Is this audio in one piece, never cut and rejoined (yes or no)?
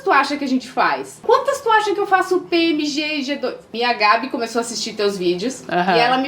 no